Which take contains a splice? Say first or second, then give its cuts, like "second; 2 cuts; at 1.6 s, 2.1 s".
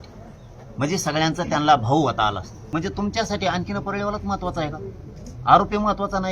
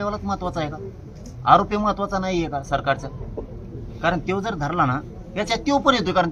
first; 1 cut; at 2.5 s